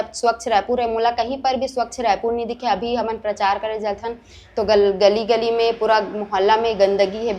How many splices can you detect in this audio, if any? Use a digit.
0